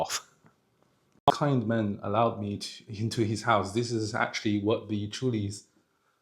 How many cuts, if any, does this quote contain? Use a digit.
1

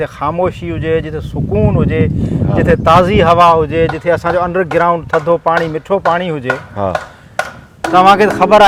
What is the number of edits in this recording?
0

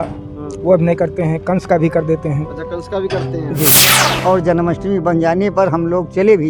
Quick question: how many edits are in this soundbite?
1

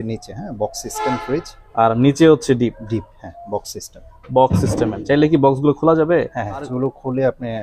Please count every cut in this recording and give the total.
2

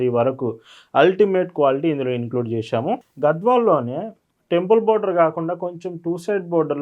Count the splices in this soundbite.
1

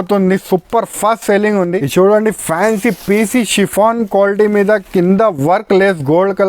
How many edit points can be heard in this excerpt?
1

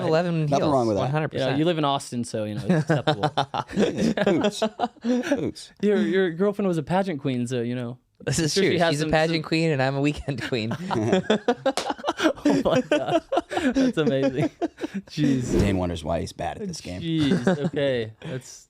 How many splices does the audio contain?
1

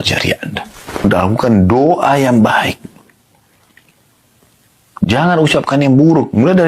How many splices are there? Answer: 1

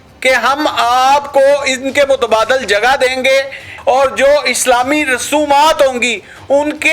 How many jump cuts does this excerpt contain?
1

